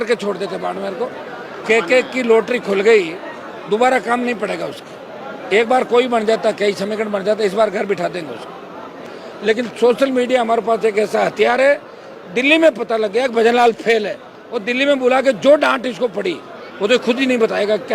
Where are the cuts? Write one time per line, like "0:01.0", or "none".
0:01.6
0:09.1